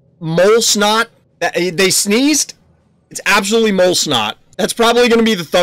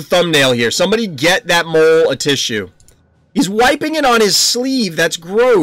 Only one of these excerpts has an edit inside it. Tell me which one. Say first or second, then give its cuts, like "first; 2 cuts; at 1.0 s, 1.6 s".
first; 2 cuts; at 1.2 s, 4.4 s